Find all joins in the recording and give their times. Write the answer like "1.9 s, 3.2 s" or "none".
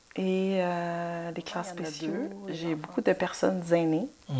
1.9 s

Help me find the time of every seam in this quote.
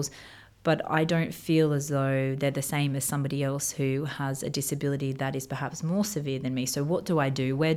none

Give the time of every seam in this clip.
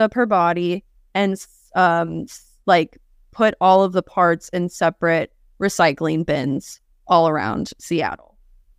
none

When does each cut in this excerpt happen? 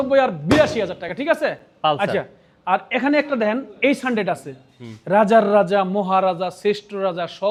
none

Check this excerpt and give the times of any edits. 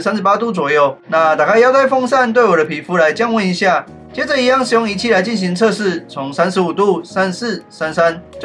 1.0 s

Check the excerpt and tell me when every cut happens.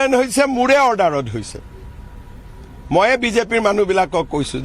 3.3 s

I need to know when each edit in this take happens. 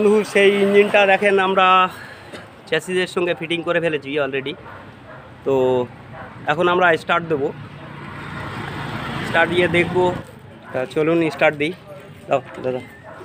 10.3 s

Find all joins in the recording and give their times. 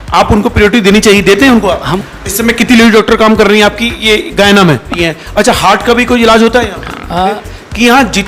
1.9 s, 5.0 s, 7.4 s

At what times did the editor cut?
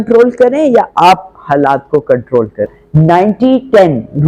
2.7 s

